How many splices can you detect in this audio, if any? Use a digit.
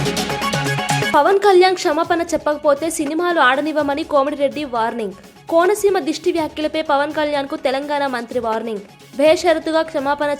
1